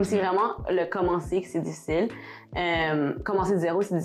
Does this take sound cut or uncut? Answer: uncut